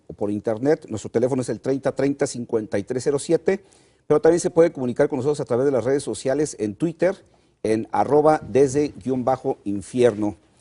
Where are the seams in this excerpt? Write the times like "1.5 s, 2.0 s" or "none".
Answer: 4.9 s